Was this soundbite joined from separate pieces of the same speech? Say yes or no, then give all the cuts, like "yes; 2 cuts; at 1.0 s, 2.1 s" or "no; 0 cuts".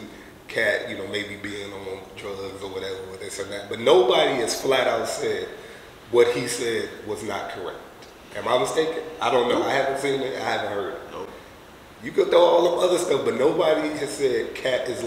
no; 0 cuts